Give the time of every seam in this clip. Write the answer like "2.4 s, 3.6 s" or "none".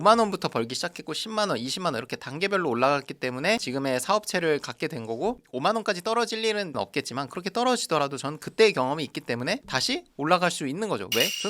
3.6 s, 5.4 s